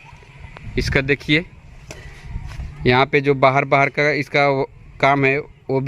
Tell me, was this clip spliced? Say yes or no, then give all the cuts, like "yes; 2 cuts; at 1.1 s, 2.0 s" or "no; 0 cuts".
no; 0 cuts